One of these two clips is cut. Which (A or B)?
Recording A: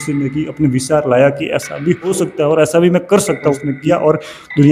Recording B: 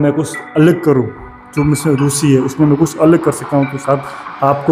A